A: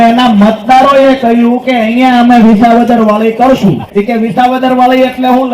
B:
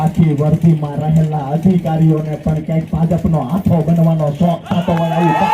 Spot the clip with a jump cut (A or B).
A